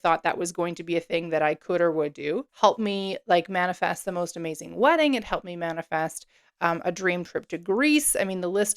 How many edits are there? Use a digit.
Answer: 1